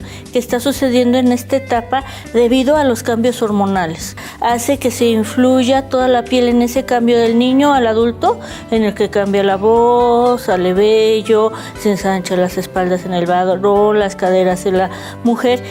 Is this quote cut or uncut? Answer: uncut